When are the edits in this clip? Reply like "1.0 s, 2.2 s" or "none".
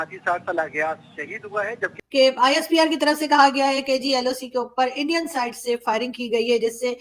1.9 s